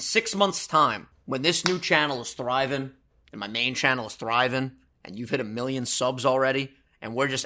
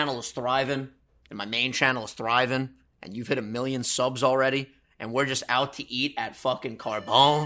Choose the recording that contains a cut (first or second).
first